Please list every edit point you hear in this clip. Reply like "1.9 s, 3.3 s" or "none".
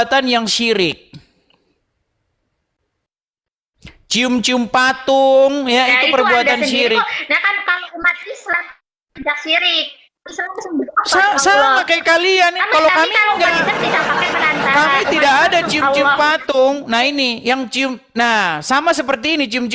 none